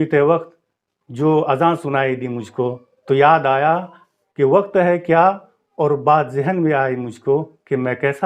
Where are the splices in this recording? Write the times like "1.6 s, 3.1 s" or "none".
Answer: none